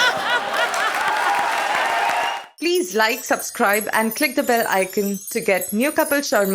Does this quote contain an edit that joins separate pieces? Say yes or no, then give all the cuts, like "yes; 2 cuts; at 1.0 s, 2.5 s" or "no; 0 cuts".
yes; 1 cut; at 2.4 s